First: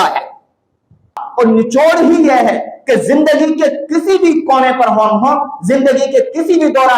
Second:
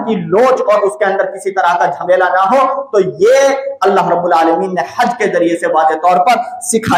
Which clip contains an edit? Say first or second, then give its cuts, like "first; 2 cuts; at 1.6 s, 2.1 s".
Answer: first; 1 cut; at 1.2 s